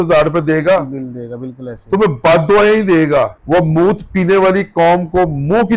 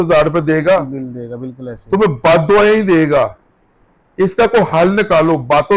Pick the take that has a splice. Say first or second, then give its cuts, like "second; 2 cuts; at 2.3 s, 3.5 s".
first; 1 cut; at 3.4 s